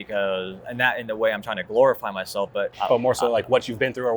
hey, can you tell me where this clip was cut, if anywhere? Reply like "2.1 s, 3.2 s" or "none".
2.7 s